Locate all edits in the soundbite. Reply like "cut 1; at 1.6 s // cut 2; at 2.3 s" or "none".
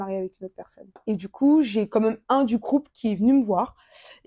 cut 1; at 1.0 s